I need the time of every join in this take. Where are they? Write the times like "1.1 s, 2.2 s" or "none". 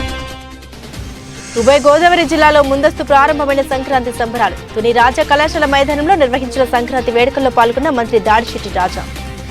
0.9 s

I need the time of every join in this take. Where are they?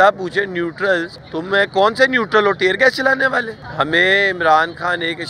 1.2 s, 3.6 s

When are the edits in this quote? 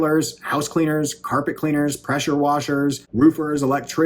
3.0 s

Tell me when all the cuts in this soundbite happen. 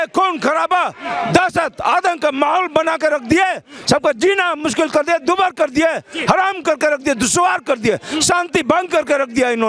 none

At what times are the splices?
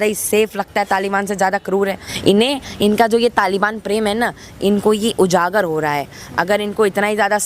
2.1 s

